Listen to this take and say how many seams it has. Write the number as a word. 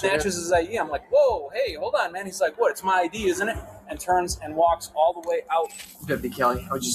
one